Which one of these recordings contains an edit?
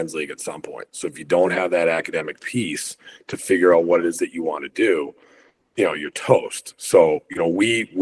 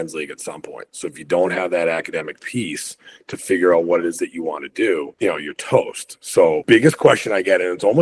second; 2 cuts; at 5.1 s, 6.6 s

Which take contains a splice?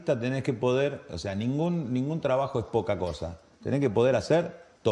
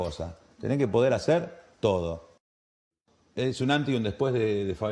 second; 1 cut; at 2.9 s

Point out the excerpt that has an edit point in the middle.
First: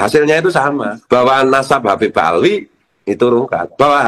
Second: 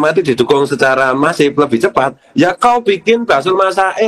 first; 1 cut; at 0.9 s

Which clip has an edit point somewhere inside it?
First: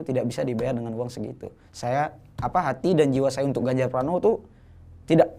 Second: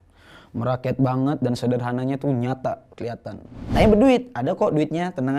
second; 1 cut; at 3.7 s

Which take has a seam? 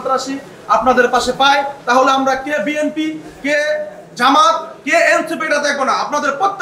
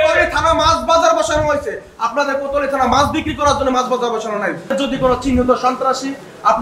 second; 1 cut; at 4.7 s

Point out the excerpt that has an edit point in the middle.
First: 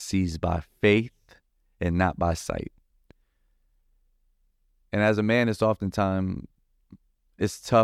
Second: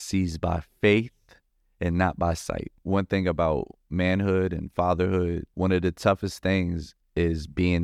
second; 2 cuts; at 2.7 s, 5.5 s

